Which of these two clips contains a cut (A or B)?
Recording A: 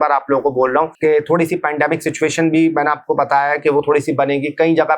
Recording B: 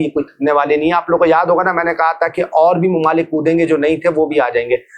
A